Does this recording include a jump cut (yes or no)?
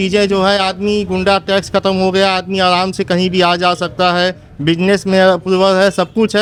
no